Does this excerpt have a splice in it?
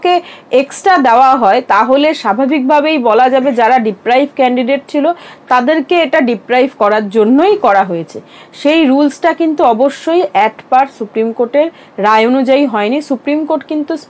no; 0 cuts

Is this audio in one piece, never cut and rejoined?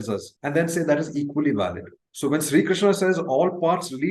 yes; 0 cuts

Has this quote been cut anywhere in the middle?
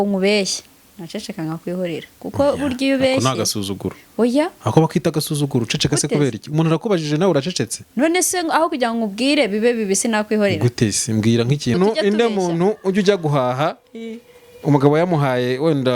yes; 1 cut; at 11.7 s

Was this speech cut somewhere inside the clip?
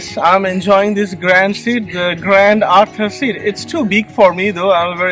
no; 0 cuts

